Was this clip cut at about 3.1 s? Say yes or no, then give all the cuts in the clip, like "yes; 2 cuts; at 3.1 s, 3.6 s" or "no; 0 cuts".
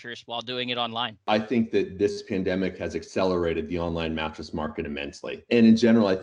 no; 2 cuts; at 1.2 s, 5.5 s